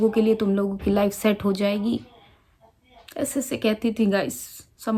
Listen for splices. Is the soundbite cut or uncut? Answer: uncut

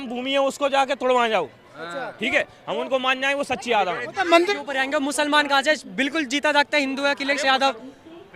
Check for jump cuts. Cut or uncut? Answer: cut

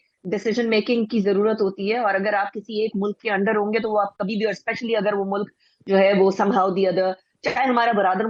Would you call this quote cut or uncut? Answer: uncut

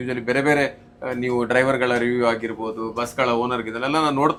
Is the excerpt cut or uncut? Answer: uncut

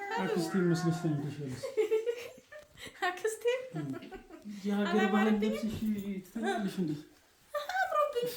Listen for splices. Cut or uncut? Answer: uncut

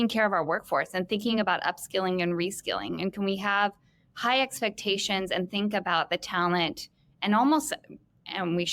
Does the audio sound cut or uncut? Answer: uncut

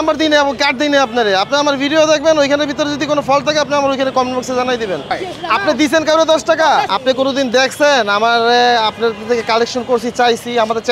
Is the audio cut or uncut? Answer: cut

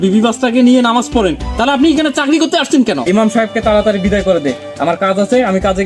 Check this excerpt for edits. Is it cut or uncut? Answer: cut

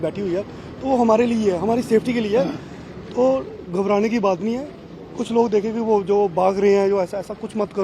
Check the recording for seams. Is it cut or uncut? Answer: uncut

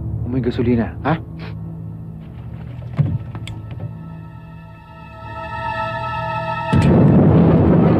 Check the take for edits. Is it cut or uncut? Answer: uncut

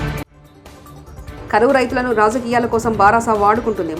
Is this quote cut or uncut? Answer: uncut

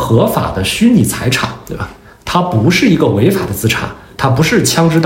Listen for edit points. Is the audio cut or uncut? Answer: uncut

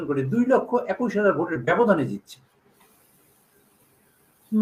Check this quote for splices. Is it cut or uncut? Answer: uncut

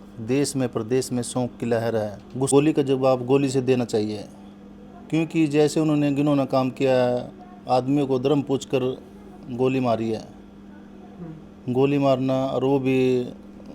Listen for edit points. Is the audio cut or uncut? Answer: cut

